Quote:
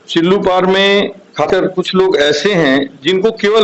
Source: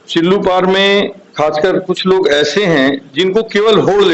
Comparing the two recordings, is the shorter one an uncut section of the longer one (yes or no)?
no